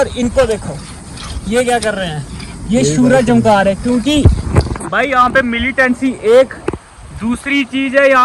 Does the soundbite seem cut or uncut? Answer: uncut